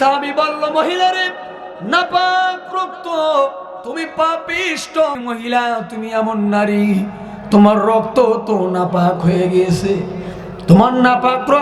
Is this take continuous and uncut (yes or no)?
no